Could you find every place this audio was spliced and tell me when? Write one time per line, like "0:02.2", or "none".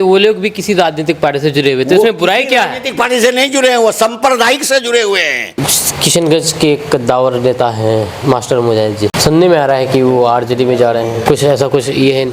0:05.7
0:09.2
0:11.2